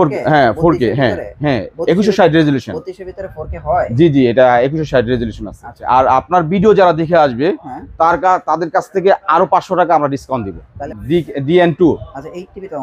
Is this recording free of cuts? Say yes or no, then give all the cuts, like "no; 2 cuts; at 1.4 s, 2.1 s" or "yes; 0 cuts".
no; 2 cuts; at 5.8 s, 10.8 s